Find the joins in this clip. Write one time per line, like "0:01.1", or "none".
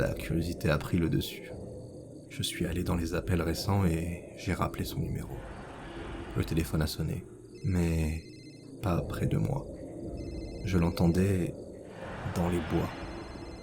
0:01.2